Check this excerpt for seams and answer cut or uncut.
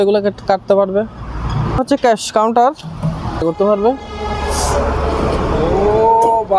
cut